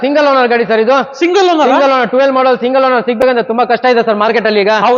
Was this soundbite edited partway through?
no; 0 cuts

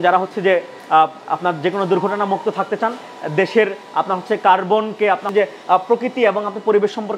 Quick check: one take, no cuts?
yes; 0 cuts

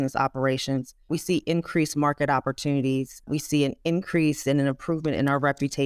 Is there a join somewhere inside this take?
yes; 1 cut; at 3.2 s

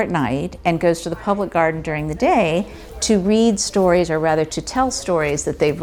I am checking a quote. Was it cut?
no; 0 cuts

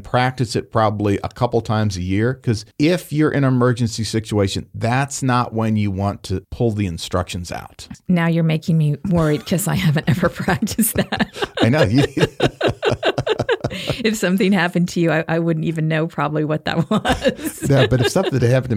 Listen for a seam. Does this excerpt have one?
yes; 1 cut; at 2.7 s

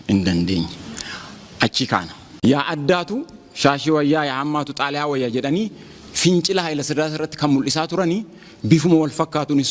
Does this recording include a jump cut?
yes; 1 cut; at 2.7 s

